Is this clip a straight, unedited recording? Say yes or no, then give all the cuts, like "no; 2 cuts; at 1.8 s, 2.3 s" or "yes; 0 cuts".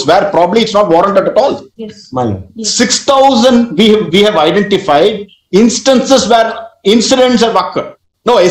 yes; 0 cuts